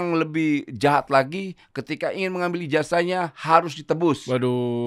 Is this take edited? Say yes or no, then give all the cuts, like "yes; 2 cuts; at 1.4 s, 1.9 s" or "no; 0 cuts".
no; 0 cuts